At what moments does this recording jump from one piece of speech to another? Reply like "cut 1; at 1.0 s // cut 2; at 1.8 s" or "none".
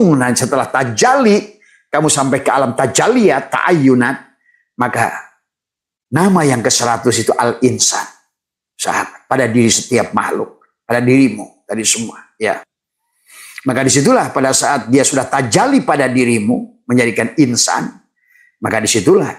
none